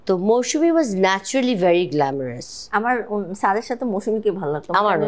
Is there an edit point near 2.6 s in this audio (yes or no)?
no